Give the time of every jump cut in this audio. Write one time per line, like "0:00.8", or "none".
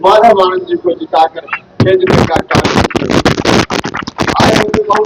none